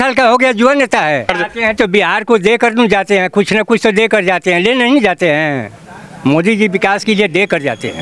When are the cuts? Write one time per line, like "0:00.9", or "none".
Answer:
0:01.3